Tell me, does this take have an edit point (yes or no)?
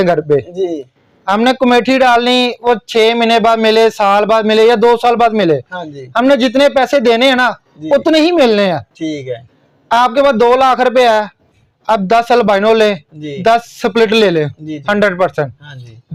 no